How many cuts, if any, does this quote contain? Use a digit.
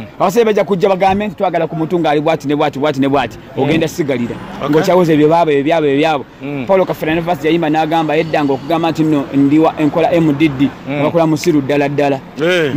0